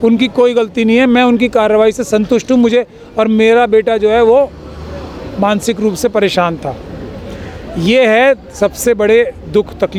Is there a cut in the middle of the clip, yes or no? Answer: no